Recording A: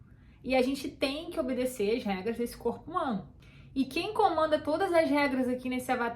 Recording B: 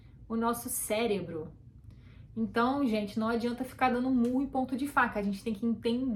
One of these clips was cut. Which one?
A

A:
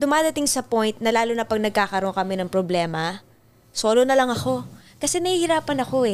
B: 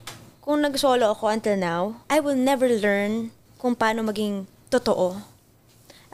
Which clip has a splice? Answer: B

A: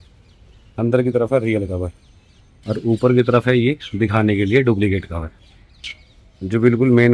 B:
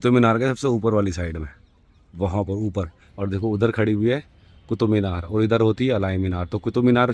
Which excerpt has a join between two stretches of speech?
B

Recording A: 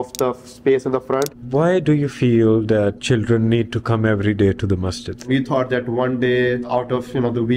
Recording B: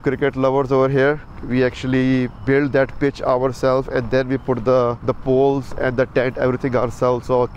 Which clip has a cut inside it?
A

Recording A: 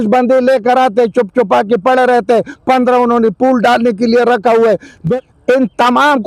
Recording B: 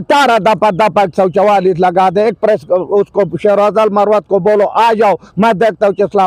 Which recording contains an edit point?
A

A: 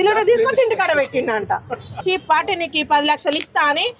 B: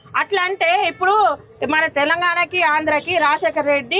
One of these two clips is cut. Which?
A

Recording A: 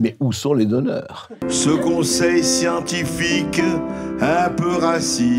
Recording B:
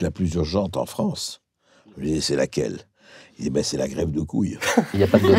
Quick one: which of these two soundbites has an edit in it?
A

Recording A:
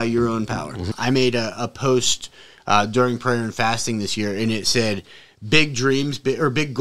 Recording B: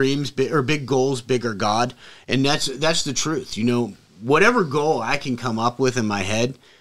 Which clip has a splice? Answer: A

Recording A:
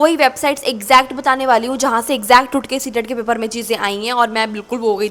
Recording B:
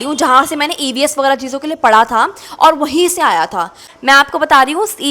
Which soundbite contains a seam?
B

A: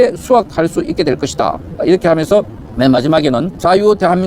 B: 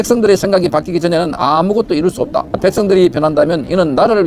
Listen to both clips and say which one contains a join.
B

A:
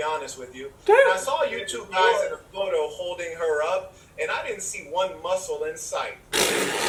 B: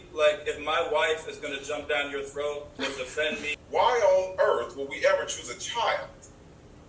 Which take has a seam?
B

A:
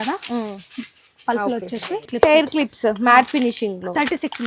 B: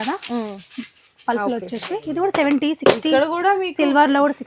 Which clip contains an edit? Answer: A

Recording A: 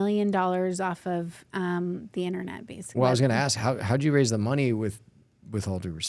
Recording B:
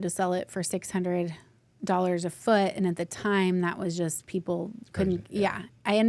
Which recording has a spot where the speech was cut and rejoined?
A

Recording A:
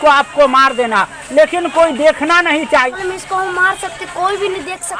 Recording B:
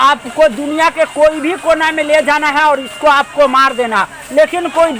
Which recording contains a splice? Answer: A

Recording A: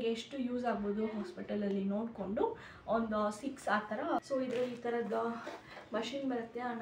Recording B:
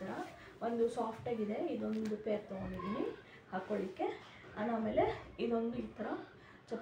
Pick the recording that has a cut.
A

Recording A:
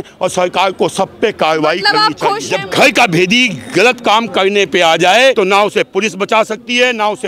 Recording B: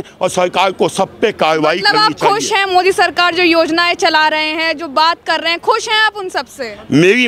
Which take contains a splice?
A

